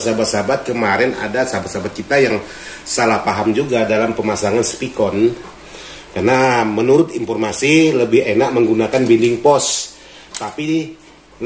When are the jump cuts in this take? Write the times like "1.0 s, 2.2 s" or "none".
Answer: none